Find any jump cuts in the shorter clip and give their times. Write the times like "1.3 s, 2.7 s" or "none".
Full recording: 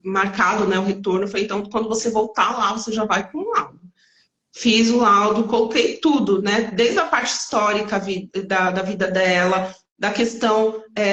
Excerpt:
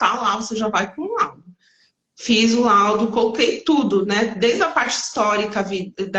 none